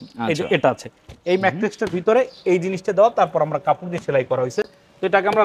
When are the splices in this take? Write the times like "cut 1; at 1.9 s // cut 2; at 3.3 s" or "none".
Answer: none